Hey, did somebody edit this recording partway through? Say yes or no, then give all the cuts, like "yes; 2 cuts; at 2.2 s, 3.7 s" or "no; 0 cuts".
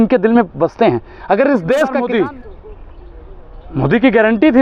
yes; 1 cut; at 2.0 s